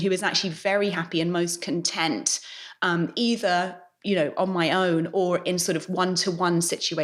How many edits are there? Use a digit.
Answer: 0